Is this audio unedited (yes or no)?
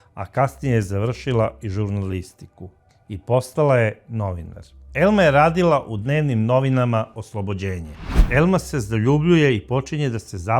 no